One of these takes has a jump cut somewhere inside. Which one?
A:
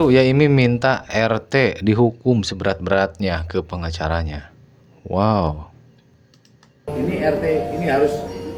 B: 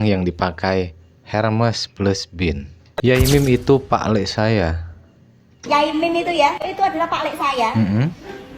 B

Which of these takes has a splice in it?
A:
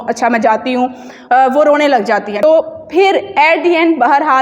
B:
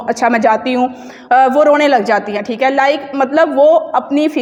A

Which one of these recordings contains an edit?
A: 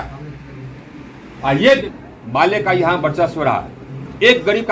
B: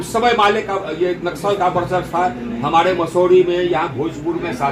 A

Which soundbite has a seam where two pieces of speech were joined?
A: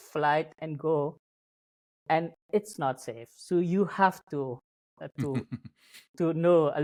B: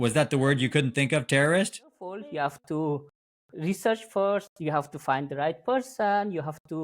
B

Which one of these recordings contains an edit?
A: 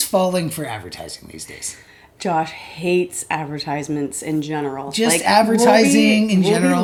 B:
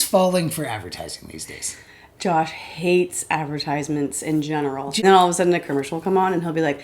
B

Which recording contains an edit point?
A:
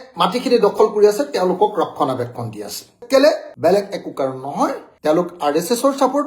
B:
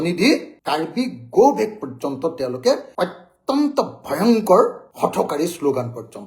A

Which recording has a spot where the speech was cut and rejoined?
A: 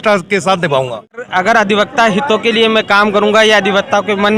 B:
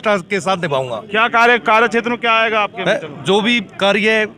A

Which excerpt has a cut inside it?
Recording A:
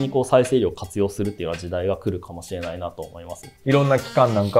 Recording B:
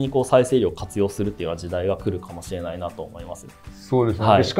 A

